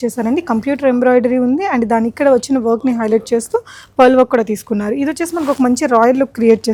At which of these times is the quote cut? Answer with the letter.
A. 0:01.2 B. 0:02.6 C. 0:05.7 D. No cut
D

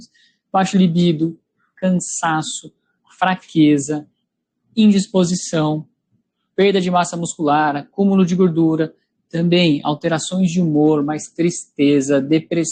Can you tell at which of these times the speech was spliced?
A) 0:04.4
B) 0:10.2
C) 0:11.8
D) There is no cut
B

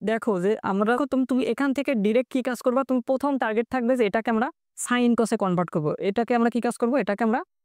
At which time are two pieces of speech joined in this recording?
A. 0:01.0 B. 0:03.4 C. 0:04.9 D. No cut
A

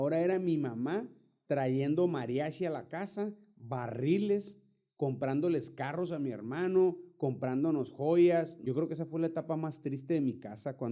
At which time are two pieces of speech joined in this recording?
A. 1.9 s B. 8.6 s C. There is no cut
B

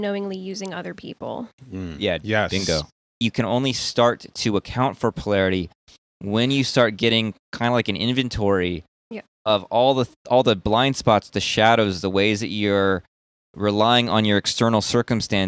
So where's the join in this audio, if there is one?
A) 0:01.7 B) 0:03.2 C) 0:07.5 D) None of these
B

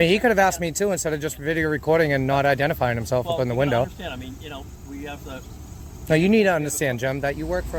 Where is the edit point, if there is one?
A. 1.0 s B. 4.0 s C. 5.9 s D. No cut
D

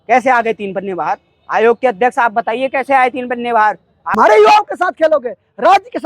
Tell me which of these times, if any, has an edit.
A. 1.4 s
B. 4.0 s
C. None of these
B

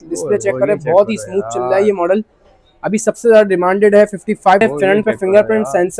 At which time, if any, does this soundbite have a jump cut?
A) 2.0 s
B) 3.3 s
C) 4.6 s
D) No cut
C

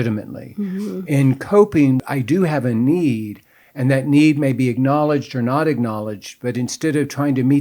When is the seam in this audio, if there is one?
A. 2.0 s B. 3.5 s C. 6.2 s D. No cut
A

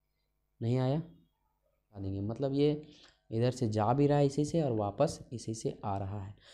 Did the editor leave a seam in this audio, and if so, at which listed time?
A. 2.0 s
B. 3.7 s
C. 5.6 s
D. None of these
A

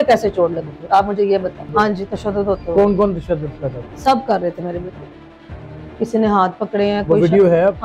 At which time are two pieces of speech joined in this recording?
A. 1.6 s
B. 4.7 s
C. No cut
A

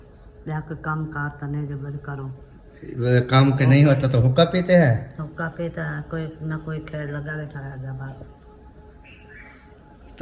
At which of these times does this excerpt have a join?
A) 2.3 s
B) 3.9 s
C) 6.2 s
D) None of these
D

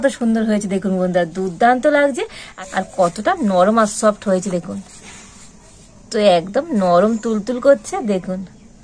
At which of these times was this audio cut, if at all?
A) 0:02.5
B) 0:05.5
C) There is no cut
A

